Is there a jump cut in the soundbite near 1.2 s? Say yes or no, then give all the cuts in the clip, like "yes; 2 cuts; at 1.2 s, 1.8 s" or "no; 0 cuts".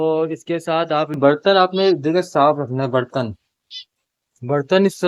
yes; 1 cut; at 1.2 s